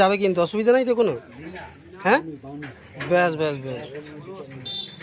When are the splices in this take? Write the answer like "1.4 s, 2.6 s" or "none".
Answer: none